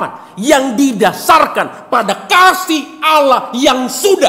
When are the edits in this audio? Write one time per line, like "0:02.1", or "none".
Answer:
none